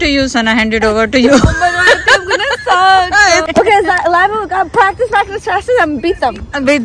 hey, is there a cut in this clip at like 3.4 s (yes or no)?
yes